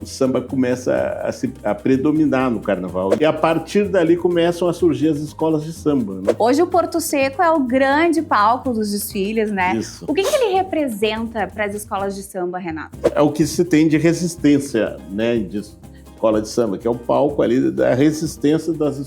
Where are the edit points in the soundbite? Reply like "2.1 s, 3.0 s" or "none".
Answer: 3.2 s, 6.2 s, 13.0 s